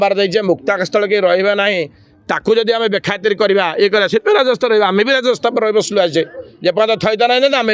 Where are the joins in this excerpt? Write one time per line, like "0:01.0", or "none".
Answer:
none